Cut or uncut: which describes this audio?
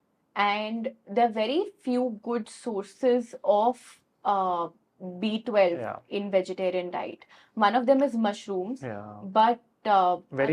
uncut